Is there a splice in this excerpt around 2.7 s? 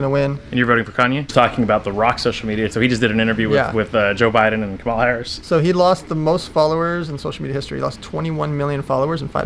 yes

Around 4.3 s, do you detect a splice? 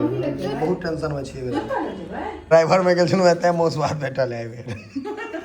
no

